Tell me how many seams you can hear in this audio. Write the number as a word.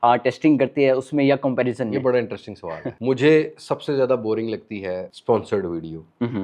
two